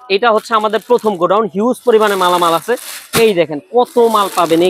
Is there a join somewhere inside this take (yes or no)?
no